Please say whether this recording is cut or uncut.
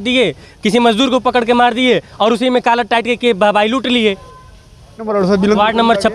cut